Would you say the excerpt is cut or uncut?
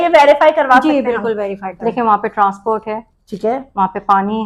cut